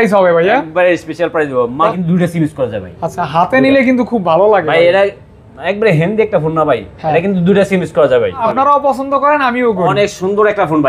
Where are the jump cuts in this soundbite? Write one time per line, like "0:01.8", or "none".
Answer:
0:02.0
0:08.4